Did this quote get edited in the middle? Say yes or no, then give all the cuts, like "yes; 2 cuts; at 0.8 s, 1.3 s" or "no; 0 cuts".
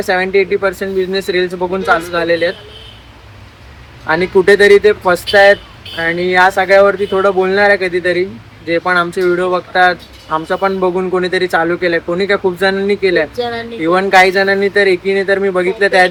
no; 0 cuts